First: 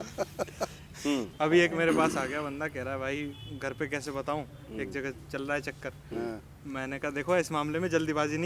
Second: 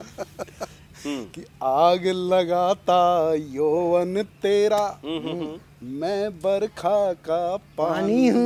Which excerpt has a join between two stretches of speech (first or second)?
first